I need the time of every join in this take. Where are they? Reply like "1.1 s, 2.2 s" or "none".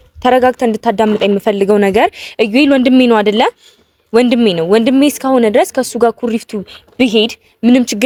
none